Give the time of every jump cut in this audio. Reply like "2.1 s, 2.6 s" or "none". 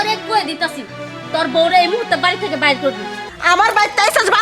3.3 s